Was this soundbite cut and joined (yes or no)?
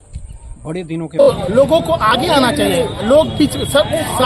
yes